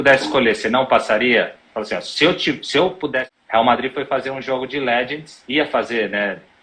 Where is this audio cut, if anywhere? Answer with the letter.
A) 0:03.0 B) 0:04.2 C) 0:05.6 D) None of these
A